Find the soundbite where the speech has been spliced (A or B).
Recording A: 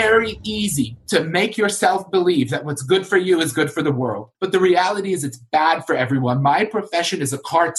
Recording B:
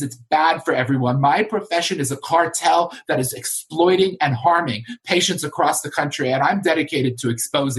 A